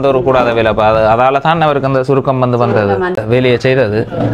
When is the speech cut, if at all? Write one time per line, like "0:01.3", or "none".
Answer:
0:03.2